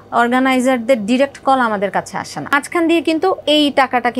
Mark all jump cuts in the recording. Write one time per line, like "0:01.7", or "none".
0:02.5
0:03.4